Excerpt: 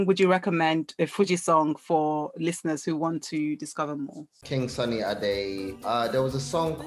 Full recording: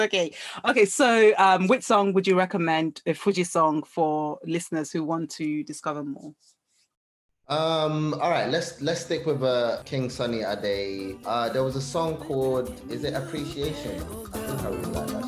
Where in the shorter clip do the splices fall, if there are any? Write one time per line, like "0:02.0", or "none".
0:04.4